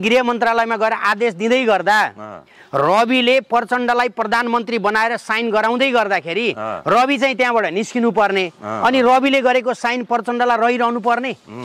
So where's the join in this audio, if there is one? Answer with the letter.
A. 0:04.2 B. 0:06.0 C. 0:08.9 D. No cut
D